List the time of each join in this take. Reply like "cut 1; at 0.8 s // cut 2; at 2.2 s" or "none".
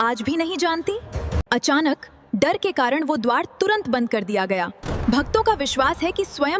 cut 1; at 1.4 s